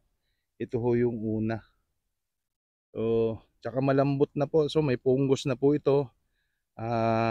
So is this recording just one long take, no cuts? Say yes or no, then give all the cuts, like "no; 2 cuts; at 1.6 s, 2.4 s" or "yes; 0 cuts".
yes; 0 cuts